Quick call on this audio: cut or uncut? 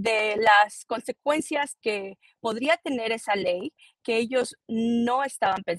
uncut